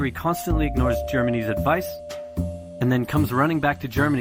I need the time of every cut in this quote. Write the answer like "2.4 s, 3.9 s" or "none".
none